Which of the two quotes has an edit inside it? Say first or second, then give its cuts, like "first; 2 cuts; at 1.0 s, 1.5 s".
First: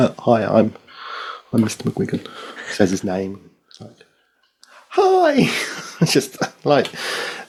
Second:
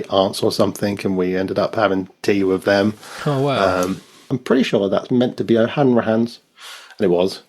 second; 1 cut; at 4.4 s